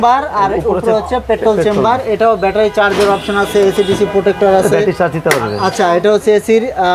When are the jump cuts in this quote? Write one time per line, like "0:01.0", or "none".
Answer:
none